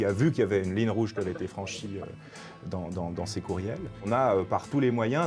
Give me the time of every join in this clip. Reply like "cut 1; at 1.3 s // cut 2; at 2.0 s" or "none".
cut 1; at 4.1 s